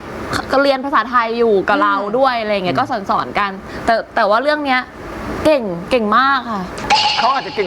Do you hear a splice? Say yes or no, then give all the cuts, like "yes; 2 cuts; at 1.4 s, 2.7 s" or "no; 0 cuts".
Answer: no; 0 cuts